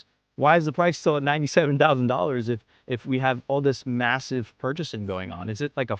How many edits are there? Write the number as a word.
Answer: zero